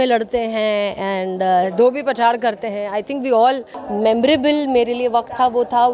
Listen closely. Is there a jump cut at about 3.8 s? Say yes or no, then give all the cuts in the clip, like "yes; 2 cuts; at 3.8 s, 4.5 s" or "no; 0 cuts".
yes; 1 cut; at 3.8 s